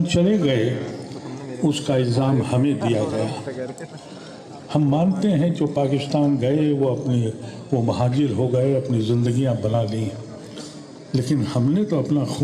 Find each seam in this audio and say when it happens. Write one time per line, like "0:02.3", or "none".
0:09.8